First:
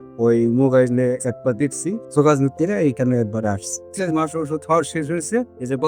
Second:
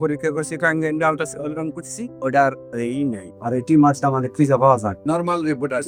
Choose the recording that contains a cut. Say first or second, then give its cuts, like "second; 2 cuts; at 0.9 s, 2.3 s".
first; 2 cuts; at 2.0 s, 3.9 s